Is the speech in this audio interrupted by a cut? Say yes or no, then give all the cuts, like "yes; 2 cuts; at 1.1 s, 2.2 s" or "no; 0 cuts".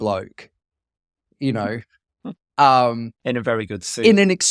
yes; 1 cut; at 2.4 s